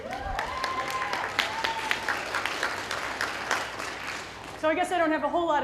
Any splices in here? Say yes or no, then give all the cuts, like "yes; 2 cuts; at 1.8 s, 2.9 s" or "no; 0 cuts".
no; 0 cuts